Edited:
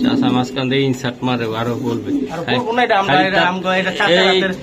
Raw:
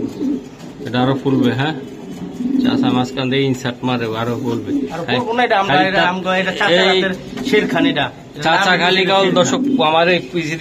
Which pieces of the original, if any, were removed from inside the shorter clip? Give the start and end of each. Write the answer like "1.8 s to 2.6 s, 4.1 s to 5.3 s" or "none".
none